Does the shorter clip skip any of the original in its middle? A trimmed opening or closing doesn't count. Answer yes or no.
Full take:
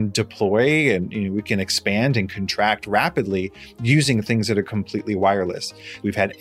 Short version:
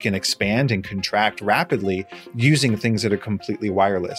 no